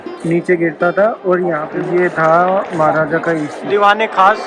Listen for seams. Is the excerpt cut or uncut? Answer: cut